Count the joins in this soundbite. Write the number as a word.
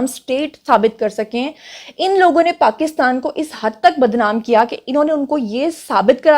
one